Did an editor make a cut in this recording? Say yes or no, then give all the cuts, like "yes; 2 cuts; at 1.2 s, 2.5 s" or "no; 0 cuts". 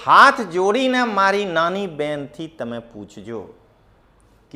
no; 0 cuts